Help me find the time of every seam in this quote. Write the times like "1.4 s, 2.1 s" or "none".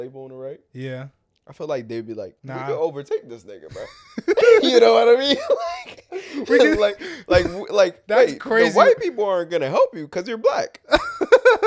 2.4 s